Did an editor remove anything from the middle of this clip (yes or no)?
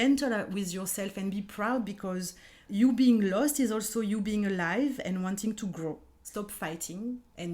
yes